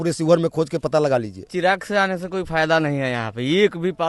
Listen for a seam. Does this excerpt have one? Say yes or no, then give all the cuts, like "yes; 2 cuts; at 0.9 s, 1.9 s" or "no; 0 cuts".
yes; 1 cut; at 1.5 s